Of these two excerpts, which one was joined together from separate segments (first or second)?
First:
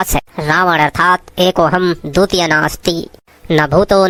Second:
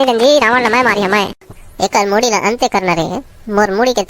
second